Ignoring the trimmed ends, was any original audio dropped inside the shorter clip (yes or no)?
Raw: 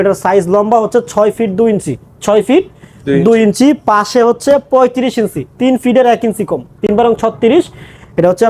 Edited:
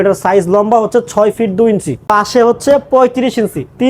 yes